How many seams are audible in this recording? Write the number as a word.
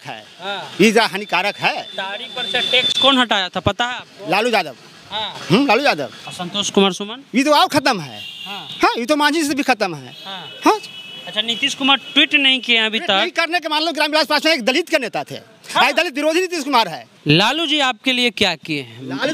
two